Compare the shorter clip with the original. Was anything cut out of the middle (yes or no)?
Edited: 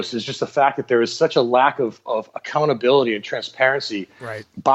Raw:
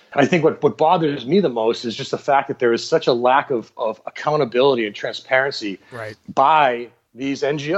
no